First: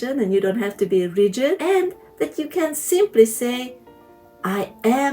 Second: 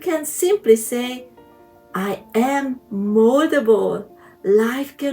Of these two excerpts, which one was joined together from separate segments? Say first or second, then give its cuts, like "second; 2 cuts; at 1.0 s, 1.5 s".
first; 1 cut; at 1.6 s